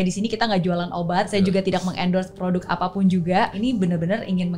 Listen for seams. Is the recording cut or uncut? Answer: cut